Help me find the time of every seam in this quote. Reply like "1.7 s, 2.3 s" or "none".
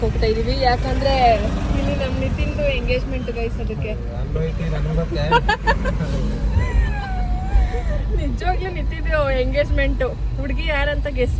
none